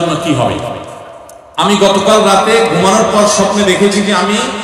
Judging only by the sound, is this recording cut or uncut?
cut